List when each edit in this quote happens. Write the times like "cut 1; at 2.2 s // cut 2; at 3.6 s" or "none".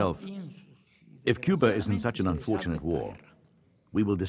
none